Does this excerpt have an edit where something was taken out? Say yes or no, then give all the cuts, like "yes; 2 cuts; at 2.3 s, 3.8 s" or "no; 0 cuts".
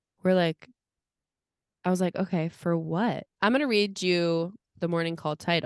yes; 1 cut; at 3.3 s